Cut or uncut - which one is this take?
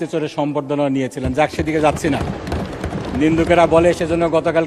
uncut